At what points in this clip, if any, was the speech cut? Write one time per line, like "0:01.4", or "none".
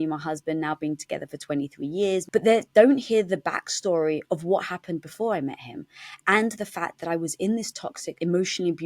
0:02.3